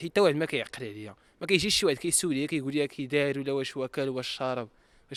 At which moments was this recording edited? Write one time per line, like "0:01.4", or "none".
none